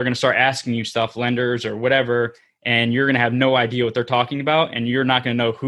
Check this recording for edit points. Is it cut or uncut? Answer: uncut